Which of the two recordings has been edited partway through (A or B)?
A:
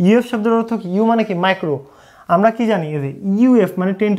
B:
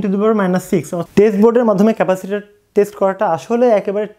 B